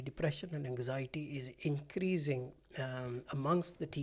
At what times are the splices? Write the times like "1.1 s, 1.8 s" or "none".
none